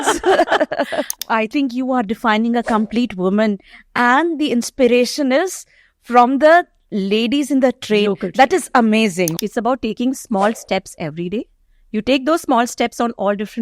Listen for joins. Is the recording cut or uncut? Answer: cut